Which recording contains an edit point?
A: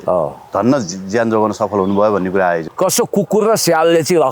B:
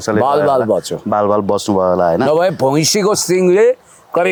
A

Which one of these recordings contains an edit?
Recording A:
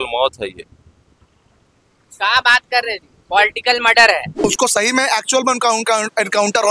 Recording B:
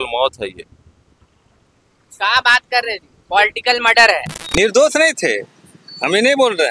A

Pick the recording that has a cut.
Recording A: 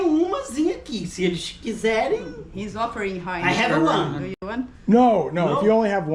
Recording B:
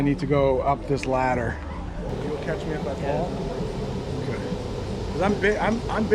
B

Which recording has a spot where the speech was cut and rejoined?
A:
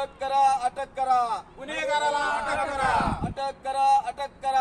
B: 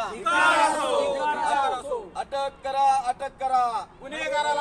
A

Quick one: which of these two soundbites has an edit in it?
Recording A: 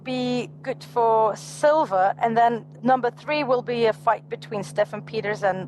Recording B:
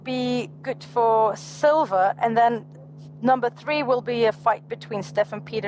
A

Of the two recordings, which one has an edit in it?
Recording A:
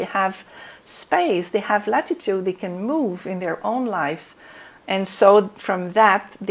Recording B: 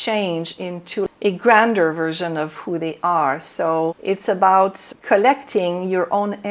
B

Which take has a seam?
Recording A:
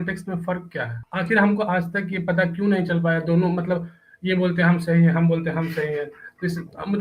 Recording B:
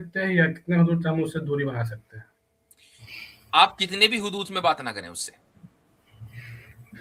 A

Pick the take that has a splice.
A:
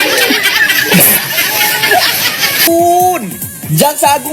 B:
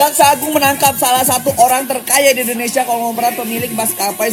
A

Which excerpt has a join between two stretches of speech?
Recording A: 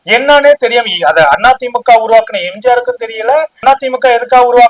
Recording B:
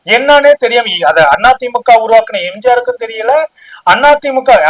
A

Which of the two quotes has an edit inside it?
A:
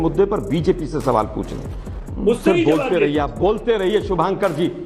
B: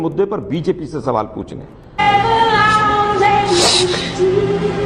A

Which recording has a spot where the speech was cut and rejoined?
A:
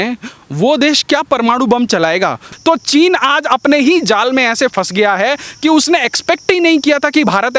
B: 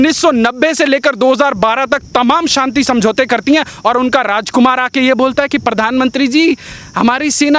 A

